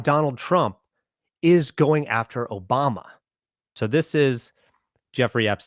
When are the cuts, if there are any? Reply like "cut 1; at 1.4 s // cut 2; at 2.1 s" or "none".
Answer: cut 1; at 3.7 s